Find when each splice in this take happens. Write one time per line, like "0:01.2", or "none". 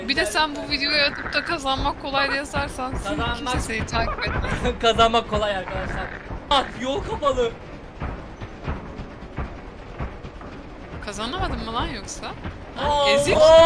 0:06.5